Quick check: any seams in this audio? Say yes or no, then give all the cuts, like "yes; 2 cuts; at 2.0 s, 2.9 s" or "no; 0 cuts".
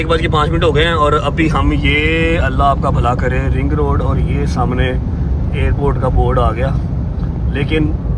no; 0 cuts